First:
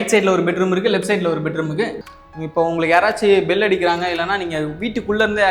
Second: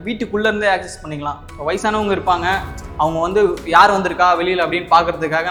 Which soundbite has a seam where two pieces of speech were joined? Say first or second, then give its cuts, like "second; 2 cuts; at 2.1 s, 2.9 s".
first; 1 cut; at 2.0 s